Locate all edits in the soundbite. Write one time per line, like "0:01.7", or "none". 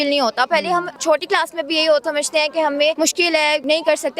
0:00.9
0:02.1
0:03.4